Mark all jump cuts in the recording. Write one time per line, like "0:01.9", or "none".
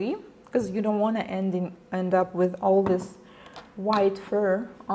0:03.8